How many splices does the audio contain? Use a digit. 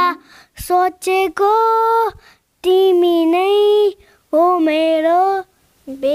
0